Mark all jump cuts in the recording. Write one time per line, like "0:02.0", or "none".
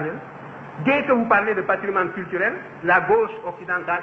none